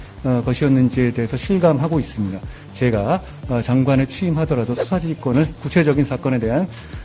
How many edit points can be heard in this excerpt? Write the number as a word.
zero